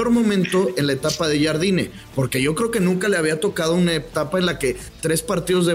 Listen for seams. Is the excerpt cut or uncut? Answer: uncut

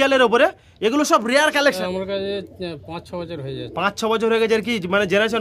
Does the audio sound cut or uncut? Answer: cut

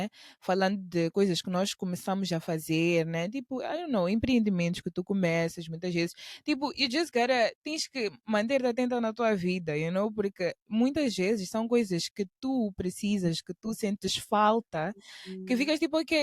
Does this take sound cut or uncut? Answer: uncut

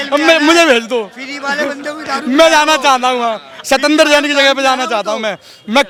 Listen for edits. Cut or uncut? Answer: uncut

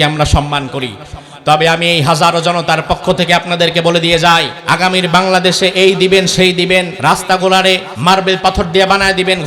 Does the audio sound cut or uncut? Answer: cut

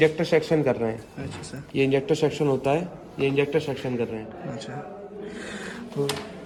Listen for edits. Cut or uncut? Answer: uncut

